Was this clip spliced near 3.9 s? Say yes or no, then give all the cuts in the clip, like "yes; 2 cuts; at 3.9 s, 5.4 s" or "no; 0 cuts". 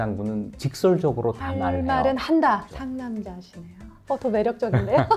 yes; 1 cut; at 3.9 s